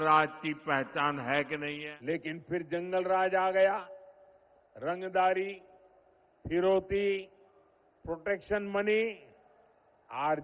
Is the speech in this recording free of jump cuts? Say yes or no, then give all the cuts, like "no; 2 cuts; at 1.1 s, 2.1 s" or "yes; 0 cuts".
no; 1 cut; at 1.8 s